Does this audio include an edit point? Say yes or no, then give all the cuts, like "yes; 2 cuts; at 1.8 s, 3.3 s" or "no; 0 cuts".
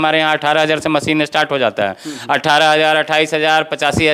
no; 0 cuts